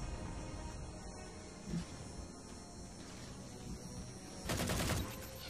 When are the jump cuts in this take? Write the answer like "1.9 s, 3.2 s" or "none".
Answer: none